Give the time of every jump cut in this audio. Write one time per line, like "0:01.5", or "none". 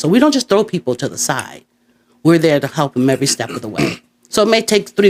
none